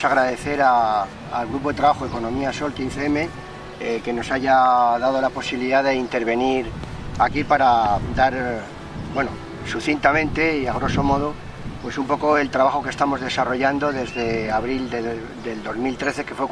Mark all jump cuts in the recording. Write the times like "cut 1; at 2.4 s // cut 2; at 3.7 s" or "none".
cut 1; at 6.7 s